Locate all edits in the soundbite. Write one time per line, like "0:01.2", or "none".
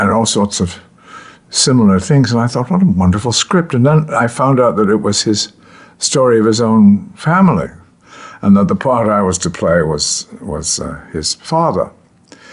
0:04.5